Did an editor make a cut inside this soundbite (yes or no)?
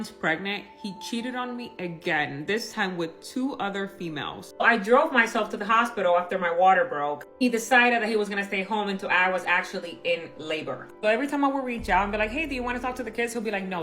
yes